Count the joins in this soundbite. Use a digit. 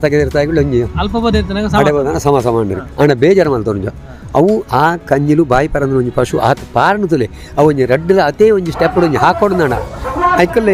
0